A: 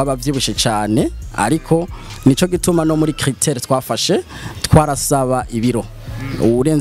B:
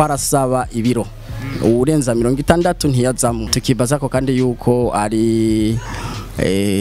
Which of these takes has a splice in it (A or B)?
B